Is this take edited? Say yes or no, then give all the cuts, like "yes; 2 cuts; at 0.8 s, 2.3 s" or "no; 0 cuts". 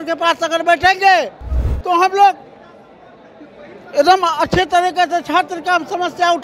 no; 0 cuts